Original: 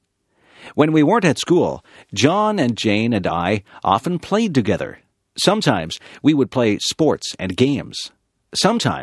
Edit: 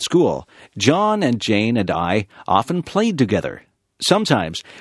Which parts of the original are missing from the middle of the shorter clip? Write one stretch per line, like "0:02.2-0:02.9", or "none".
none

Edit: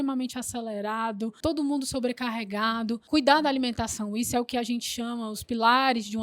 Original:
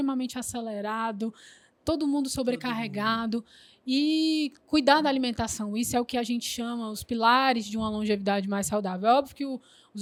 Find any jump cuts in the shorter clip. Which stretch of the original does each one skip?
0:01.4-0:01.8
0:03.4-0:04.6

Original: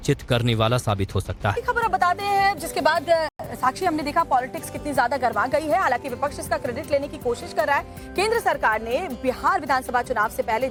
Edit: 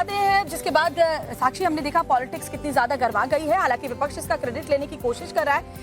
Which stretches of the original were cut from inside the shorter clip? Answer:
0:03.4-0:03.5

